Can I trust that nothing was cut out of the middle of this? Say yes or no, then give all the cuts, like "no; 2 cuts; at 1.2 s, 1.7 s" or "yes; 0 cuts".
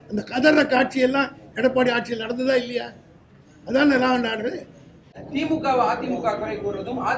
no; 1 cut; at 5.1 s